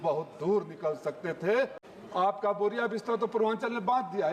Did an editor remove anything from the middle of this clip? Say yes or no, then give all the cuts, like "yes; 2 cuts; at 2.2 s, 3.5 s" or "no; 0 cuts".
yes; 1 cut; at 1.8 s